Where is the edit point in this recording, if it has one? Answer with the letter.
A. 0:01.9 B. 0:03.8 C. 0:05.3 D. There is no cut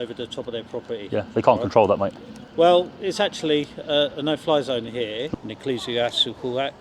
C